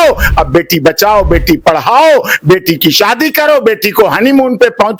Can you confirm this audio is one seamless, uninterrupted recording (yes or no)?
yes